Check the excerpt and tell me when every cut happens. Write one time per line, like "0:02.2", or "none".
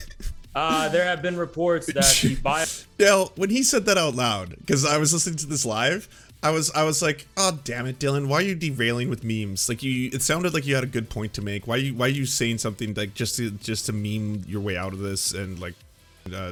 none